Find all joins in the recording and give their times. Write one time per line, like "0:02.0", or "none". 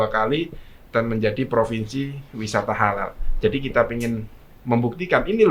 none